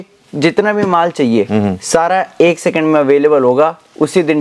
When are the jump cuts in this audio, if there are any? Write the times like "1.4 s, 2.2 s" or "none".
none